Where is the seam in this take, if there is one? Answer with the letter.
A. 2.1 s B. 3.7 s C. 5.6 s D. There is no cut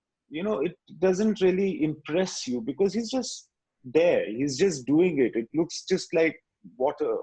D